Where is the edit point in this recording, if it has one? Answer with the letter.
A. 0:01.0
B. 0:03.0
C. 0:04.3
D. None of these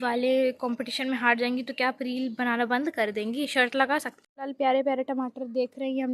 C